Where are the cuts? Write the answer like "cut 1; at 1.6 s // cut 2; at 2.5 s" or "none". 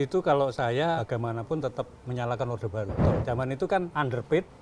cut 1; at 1.0 s // cut 2; at 3.0 s